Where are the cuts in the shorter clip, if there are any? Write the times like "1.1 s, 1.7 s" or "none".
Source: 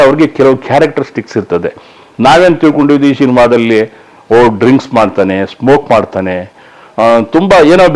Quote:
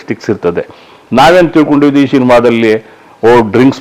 none